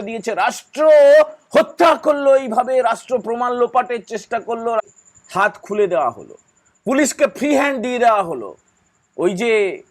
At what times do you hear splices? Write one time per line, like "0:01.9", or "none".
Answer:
0:04.8